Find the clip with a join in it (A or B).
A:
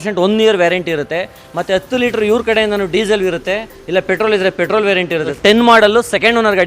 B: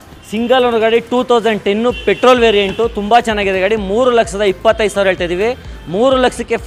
A